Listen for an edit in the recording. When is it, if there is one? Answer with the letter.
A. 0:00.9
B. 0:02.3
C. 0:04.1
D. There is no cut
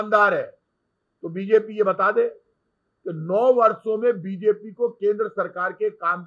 D